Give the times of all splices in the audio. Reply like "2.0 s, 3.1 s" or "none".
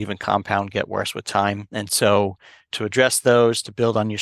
1.7 s, 2.7 s